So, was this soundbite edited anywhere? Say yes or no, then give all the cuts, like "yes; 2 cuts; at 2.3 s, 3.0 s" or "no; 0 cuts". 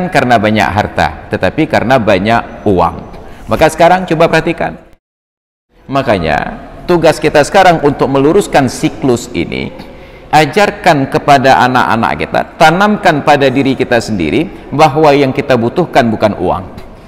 yes; 1 cut; at 5.2 s